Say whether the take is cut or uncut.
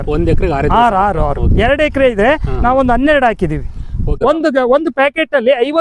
cut